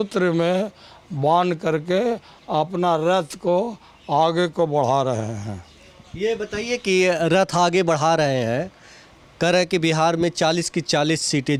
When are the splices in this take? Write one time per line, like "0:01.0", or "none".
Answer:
none

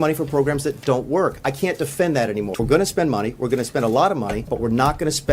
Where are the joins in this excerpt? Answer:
0:02.5
0:04.4

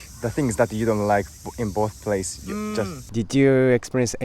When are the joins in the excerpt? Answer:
0:03.0

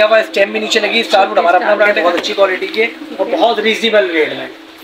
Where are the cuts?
0:02.0

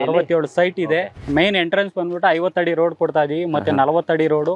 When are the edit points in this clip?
0:01.2

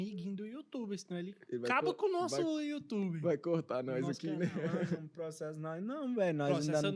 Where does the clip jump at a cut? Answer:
0:01.4
0:05.1

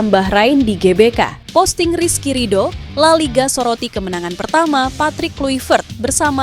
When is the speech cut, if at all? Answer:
0:01.4

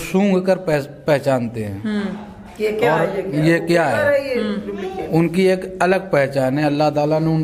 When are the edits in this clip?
none

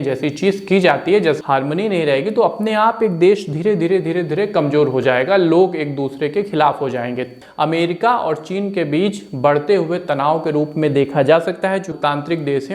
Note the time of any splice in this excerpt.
0:01.4
0:07.3
0:12.0

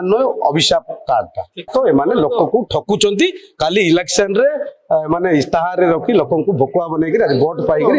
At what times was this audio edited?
0:01.7

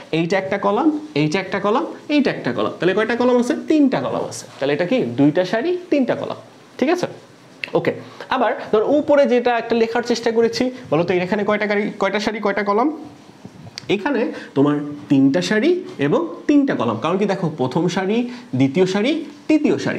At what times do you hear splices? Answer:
none

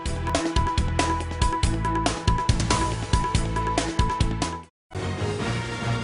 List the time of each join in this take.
0:05.0

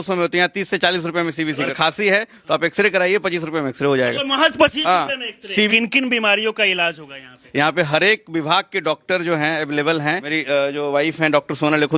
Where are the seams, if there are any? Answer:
0:01.7
0:05.3
0:07.3
0:10.3

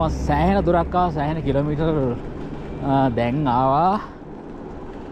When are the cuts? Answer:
none

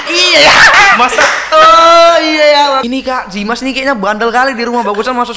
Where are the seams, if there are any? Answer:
0:02.8

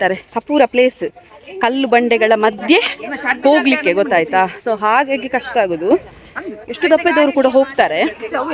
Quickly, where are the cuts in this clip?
none

